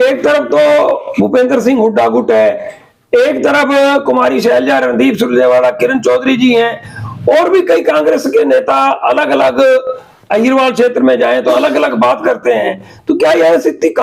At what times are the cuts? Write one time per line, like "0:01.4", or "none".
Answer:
none